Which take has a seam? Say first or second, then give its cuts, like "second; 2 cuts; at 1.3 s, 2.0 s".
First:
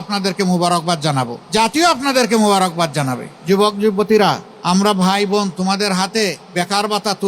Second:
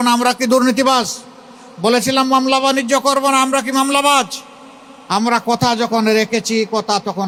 first; 4 cuts; at 1.4 s, 3.3 s, 4.5 s, 6.4 s